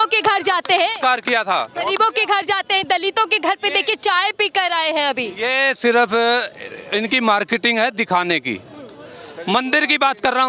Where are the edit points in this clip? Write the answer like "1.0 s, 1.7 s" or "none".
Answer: none